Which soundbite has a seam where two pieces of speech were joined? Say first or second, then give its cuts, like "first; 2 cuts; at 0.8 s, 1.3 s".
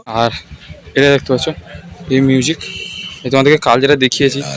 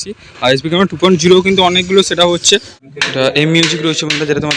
second; 1 cut; at 2.8 s